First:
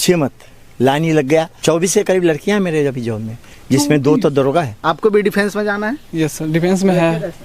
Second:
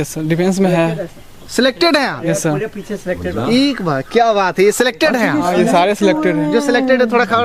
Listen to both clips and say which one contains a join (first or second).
first